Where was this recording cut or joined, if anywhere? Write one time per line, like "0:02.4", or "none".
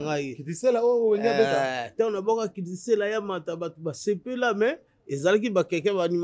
none